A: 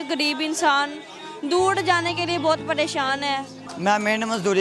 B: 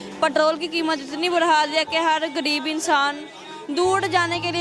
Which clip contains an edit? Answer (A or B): A